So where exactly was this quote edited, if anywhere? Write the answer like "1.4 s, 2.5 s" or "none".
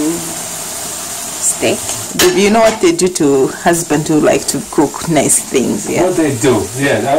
2.2 s